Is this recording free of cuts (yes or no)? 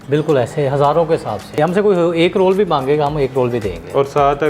no